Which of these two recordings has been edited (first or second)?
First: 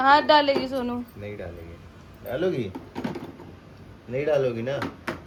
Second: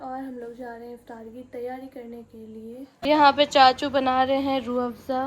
second